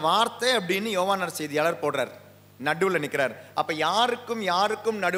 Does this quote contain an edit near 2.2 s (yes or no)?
no